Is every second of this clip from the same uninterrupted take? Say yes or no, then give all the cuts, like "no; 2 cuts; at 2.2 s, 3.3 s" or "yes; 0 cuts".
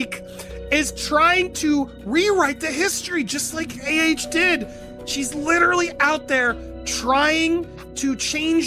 yes; 0 cuts